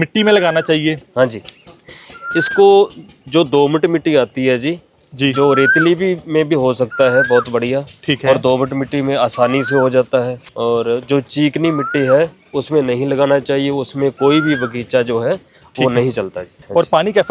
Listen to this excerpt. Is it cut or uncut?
uncut